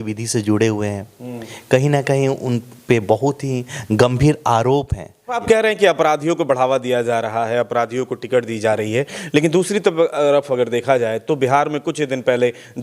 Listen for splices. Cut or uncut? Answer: cut